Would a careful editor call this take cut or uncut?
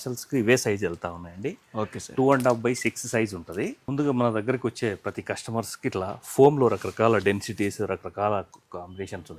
cut